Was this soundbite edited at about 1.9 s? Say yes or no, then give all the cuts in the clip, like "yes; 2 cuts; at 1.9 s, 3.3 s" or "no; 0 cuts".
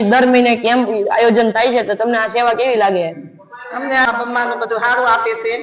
no; 1 cut; at 4.1 s